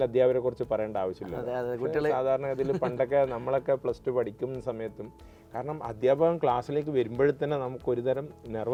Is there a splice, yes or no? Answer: no